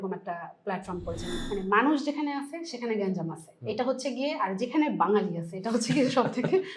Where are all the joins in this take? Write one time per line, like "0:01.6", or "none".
0:01.4